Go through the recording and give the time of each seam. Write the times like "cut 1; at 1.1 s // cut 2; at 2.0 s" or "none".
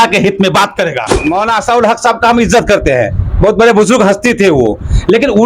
cut 1; at 1.2 s